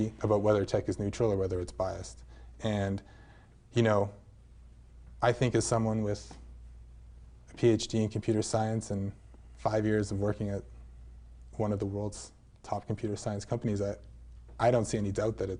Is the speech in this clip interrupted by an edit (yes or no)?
no